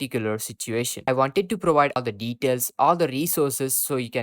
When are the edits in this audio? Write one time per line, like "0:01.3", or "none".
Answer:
0:01.0
0:02.0